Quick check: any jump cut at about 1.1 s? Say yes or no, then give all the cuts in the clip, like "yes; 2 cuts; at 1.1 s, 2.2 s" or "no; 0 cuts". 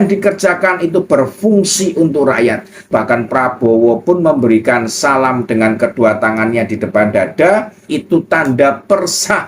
no; 2 cuts; at 2.9 s, 7.9 s